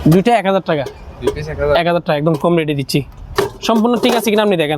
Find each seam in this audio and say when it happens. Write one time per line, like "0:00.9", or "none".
none